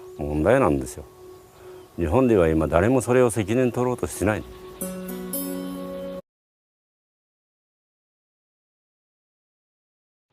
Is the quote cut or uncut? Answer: uncut